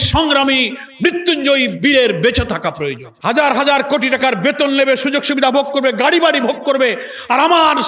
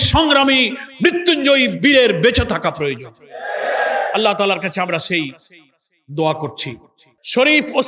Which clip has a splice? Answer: first; 1 cut; at 3.0 s

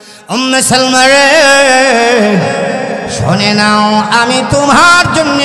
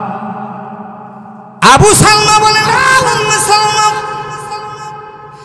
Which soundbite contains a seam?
second; 1 cut; at 1.5 s

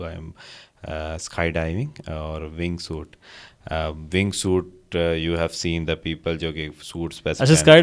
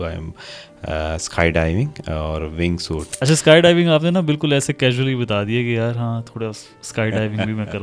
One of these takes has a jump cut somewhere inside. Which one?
second; 1 cut; at 3.2 s

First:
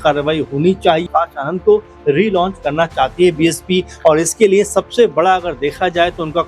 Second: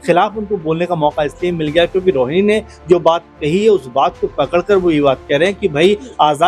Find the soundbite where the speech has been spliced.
first; 1 cut; at 1.1 s

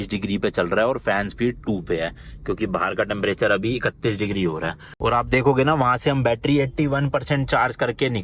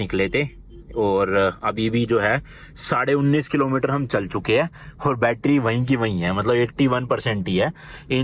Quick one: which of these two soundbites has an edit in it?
first; 1 cut; at 5.0 s

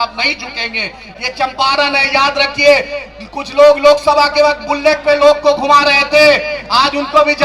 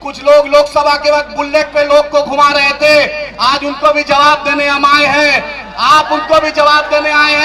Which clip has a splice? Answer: first; 1 cut; at 1.1 s

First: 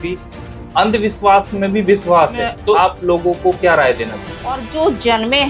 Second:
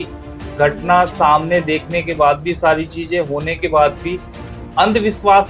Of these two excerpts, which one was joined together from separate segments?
first; 2 cuts; at 2.8 s, 4.7 s

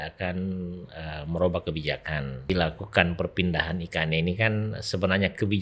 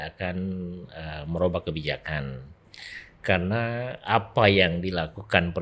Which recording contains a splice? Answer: first; 1 cut; at 2.5 s

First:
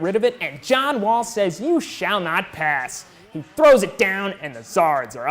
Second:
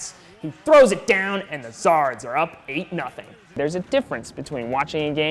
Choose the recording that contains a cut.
second; 1 cut; at 3.6 s

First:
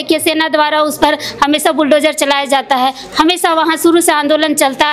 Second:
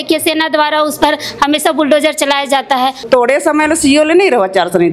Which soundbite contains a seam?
second; 1 cut; at 3.1 s

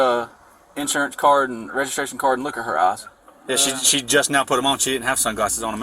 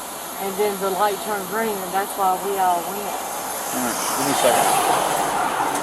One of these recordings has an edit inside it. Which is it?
first; 1 cut; at 3.3 s

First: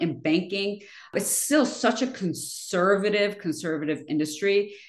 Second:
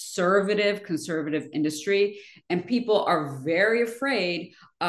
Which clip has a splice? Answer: first; 1 cut; at 1.1 s

